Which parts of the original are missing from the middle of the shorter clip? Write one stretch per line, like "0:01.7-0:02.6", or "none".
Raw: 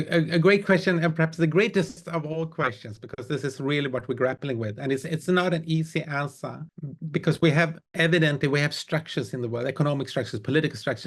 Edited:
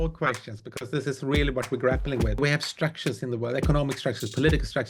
0:04.8-0:08.5